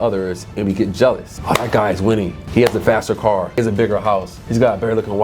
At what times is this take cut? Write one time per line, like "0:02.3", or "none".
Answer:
0:01.3
0:02.4
0:03.6
0:04.4